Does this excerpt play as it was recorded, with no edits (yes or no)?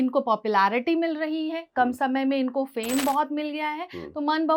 yes